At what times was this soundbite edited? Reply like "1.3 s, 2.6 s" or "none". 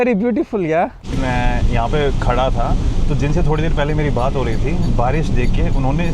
1.1 s